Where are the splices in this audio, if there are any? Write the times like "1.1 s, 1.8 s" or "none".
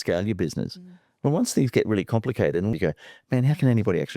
2.7 s